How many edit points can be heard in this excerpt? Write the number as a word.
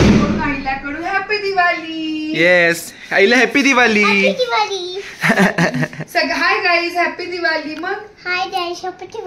zero